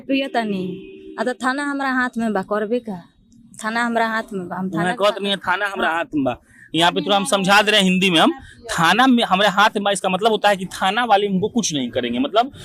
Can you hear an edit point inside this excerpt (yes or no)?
no